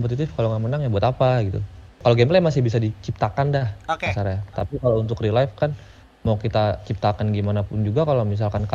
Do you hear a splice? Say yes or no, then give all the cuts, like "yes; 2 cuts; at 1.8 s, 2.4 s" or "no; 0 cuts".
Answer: yes; 1 cut; at 2.0 s